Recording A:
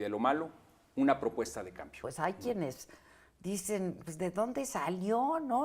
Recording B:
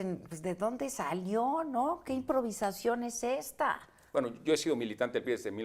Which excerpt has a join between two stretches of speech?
A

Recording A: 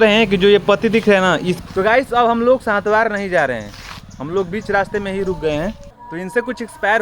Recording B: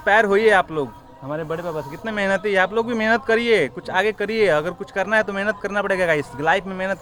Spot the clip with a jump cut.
A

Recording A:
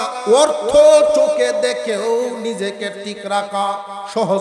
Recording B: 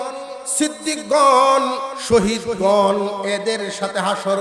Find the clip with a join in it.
B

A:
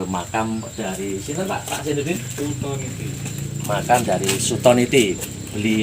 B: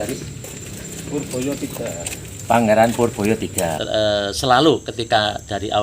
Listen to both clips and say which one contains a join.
B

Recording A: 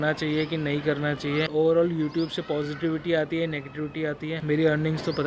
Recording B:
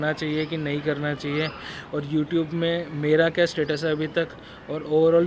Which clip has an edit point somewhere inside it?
A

